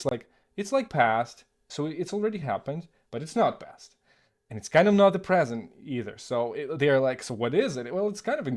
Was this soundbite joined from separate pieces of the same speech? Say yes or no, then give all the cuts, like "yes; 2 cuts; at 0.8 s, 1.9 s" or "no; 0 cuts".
no; 0 cuts